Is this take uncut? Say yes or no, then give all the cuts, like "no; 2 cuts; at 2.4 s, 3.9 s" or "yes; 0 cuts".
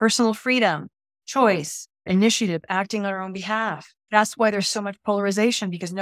no; 2 cuts; at 2.0 s, 3.9 s